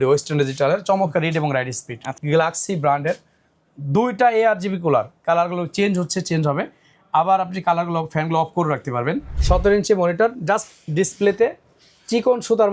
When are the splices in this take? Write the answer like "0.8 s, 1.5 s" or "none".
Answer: 2.2 s, 9.3 s